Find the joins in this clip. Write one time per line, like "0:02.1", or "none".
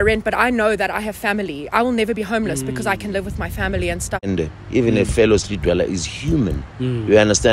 0:04.3